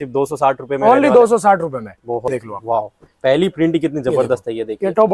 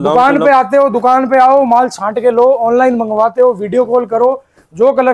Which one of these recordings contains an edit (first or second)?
first